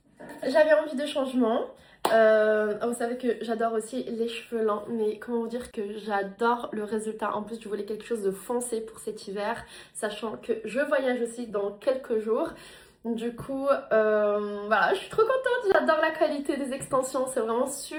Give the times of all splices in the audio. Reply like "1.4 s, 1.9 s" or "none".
none

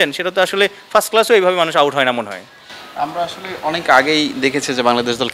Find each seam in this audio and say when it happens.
none

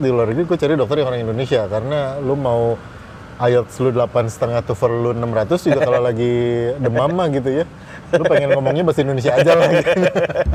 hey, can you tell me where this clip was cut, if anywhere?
none

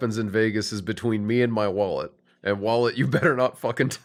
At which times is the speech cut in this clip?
none

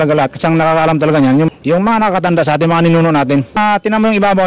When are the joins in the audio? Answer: 1.5 s, 3.6 s

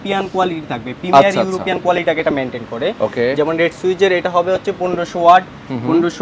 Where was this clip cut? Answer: none

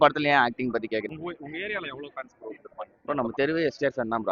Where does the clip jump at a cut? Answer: 1.1 s

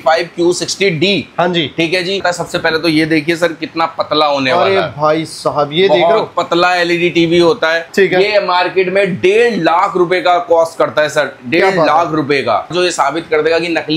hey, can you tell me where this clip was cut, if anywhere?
2.2 s, 7.9 s, 12.7 s

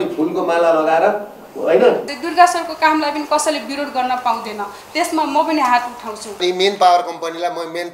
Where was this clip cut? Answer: 2.1 s, 6.3 s

